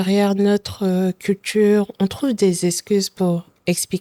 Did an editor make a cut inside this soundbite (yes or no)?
no